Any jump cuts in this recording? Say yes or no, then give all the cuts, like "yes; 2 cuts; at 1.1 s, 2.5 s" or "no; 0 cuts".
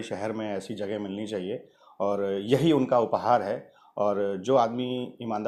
no; 0 cuts